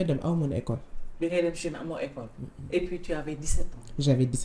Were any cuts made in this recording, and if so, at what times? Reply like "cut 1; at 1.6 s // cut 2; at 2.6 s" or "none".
none